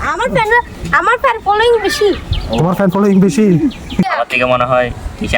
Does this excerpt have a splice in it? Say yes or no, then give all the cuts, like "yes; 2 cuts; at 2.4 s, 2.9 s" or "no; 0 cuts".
yes; 1 cut; at 4.1 s